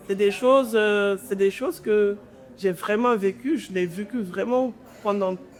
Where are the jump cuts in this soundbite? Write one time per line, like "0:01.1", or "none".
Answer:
none